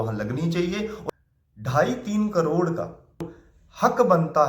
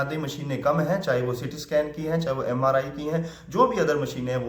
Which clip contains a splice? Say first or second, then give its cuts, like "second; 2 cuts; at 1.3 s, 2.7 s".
first; 2 cuts; at 1.0 s, 3.3 s